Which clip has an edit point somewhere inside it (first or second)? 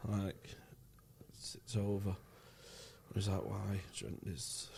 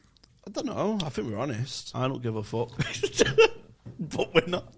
second